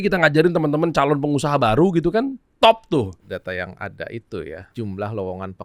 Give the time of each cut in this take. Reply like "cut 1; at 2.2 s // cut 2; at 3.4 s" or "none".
cut 1; at 3.2 s // cut 2; at 4.6 s